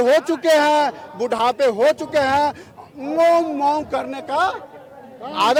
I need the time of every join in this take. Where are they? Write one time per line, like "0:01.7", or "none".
none